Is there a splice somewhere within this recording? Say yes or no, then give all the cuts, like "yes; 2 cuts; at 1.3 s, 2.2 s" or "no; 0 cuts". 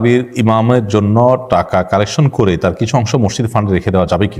no; 0 cuts